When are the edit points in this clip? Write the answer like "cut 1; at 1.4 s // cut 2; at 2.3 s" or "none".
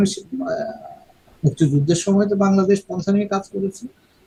none

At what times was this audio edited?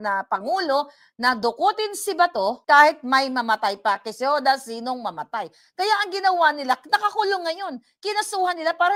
none

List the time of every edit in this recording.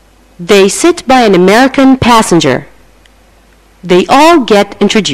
none

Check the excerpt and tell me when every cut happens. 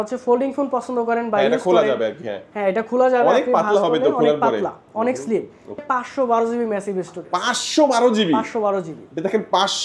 cut 1; at 5.8 s

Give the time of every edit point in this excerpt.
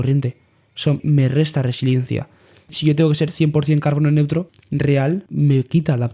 cut 1; at 1.0 s // cut 2; at 2.7 s

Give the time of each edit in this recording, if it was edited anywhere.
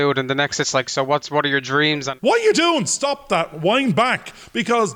cut 1; at 2.1 s

